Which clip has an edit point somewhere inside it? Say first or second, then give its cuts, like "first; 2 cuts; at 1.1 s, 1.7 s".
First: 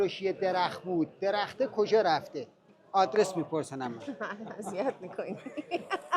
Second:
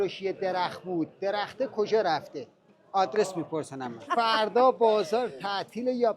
second; 1 cut; at 4.0 s